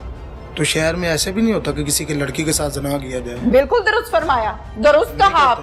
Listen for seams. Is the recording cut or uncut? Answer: uncut